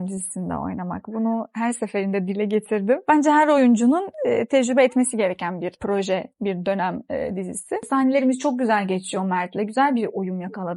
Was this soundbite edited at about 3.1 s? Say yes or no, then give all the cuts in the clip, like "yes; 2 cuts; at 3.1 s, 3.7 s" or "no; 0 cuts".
yes; 3 cuts; at 3.1 s, 5.8 s, 7.8 s